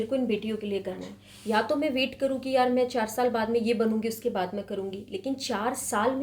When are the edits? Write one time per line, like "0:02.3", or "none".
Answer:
none